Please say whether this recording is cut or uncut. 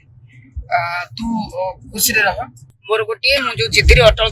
cut